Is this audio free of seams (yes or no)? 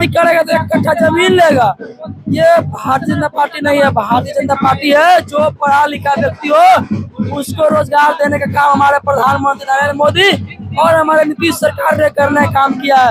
yes